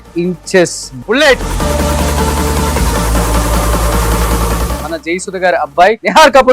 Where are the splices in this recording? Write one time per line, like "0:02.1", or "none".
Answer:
none